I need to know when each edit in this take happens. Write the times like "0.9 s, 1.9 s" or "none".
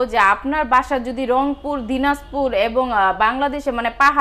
none